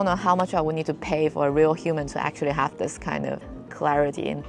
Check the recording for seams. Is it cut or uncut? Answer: cut